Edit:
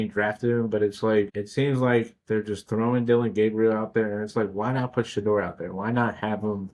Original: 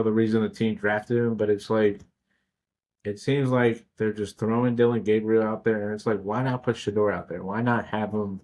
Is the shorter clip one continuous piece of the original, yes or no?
no